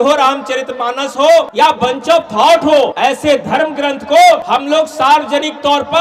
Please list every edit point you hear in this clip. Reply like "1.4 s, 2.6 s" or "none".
1.5 s, 2.9 s, 4.4 s